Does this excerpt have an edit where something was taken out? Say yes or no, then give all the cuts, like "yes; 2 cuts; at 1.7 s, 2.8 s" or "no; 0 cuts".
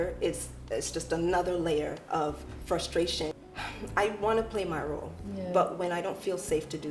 yes; 1 cut; at 3.4 s